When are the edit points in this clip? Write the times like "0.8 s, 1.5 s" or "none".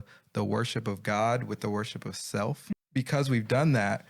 2.6 s